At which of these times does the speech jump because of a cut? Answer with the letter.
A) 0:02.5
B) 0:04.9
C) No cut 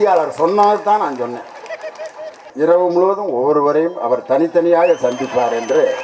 A